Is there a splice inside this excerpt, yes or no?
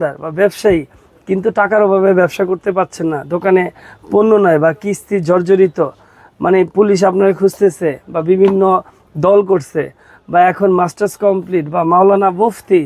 no